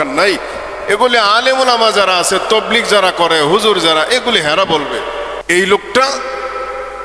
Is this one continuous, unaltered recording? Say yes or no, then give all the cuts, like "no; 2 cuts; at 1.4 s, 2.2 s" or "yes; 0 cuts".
no; 1 cut; at 5.4 s